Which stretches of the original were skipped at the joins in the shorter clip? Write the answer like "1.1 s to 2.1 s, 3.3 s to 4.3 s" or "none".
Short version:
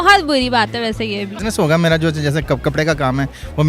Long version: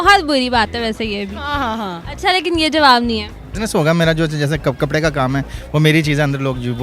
1.3 s to 3.5 s